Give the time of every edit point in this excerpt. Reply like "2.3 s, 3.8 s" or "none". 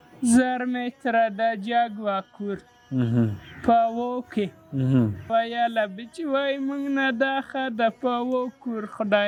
none